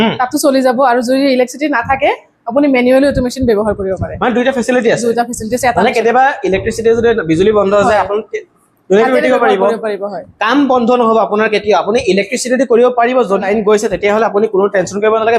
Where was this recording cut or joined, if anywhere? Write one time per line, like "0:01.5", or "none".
none